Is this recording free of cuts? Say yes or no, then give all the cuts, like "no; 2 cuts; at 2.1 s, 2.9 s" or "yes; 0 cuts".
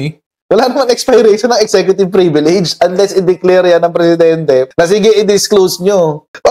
no; 1 cut; at 4.7 s